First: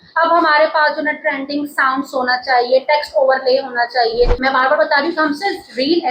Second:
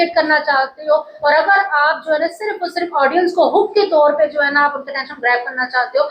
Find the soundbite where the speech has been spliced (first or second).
first